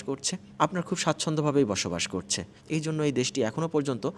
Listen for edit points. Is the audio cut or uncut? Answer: cut